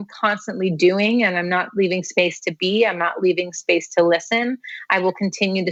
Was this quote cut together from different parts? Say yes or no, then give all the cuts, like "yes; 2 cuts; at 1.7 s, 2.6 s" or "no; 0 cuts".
no; 0 cuts